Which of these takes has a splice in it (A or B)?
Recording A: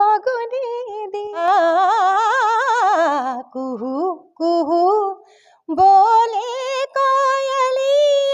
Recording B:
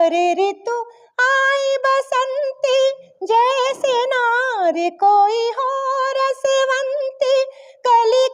A